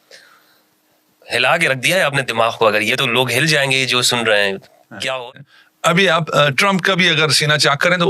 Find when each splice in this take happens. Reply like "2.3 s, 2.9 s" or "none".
5.4 s